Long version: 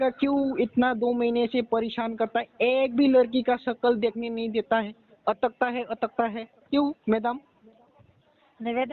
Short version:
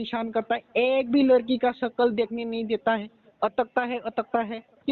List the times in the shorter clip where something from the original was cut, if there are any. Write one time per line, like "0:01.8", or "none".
none